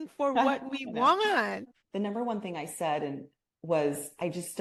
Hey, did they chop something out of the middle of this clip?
no; 0 cuts

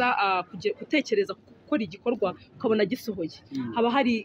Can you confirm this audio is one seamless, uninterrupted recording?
yes; 0 cuts

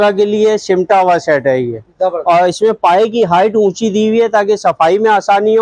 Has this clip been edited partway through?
no; 0 cuts

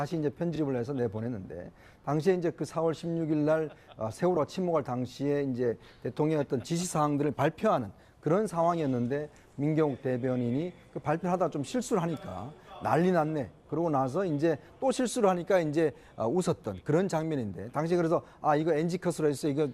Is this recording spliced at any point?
yes; 1 cut; at 16.6 s

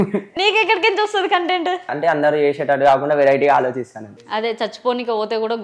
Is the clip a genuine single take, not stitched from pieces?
no; 2 cuts; at 1.9 s, 4.1 s

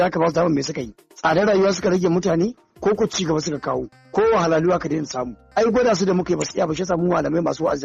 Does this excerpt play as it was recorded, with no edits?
yes; 0 cuts

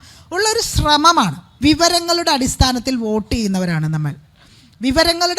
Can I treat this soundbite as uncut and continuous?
no; 1 cut; at 1.4 s

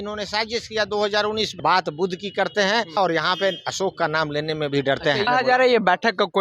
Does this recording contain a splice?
yes; 3 cuts; at 1.6 s, 3.0 s, 5.3 s

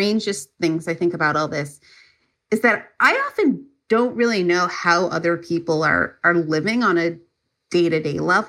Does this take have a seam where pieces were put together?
no; 0 cuts

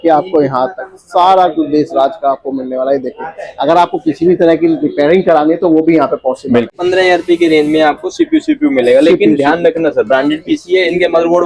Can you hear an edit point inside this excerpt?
yes; 1 cut; at 6.7 s

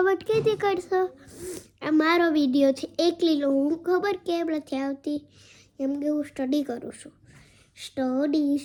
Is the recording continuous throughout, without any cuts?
yes; 0 cuts

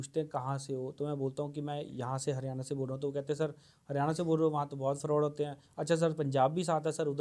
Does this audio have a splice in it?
no; 0 cuts

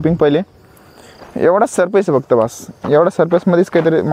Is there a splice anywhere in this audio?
no; 0 cuts

